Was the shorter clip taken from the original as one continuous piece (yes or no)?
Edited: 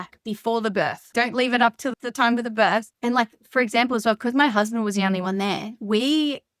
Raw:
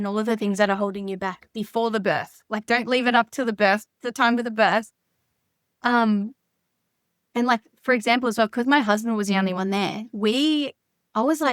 no